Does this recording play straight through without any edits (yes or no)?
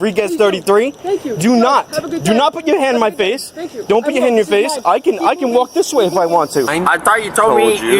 no